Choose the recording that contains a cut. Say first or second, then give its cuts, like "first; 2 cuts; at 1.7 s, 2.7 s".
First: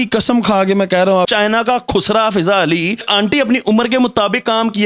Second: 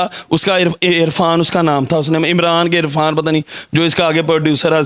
first; 2 cuts; at 1.3 s, 3.0 s